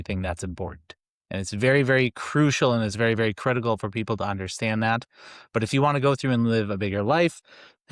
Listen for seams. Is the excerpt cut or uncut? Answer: uncut